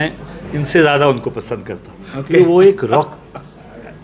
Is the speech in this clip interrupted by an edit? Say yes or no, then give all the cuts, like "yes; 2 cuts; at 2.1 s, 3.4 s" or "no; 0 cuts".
no; 0 cuts